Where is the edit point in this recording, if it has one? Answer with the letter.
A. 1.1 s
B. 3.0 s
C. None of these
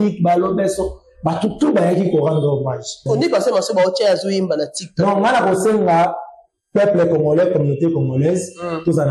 B